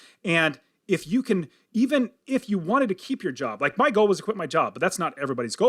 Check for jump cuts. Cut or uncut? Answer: uncut